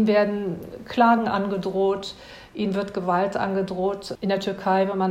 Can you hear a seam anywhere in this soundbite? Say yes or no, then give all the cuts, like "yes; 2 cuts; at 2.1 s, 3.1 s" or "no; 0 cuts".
yes; 1 cut; at 4.1 s